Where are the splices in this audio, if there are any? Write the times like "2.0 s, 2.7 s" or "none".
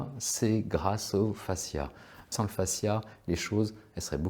2.3 s